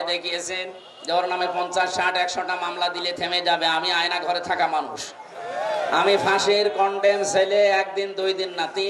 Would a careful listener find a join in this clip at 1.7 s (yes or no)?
no